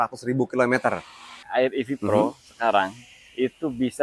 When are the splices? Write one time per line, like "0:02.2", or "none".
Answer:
0:01.4